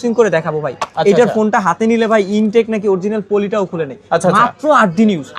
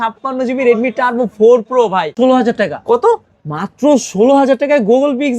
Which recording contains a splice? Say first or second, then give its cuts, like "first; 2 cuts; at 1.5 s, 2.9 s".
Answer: second; 1 cut; at 2.1 s